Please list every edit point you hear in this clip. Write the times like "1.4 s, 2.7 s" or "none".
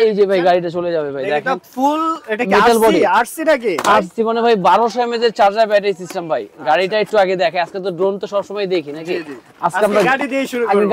none